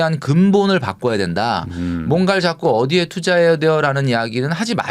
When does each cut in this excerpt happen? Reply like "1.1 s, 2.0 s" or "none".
none